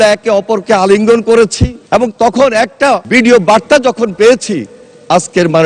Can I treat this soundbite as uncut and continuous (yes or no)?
yes